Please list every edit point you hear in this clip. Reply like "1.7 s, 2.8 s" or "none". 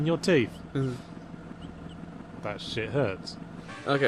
none

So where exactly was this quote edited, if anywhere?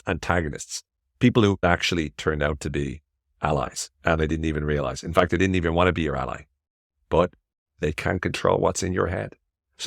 1.6 s, 7.7 s

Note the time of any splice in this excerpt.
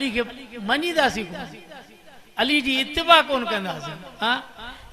none

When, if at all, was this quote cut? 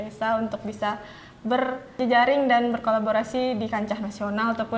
2.0 s

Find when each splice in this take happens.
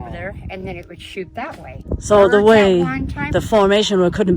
1.7 s

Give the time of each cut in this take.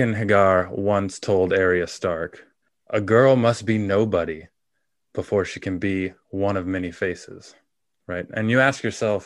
none

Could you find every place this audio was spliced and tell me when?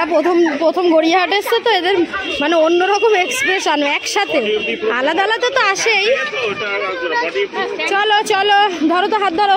none

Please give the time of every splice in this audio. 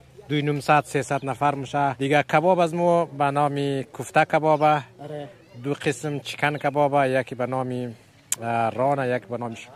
2.0 s

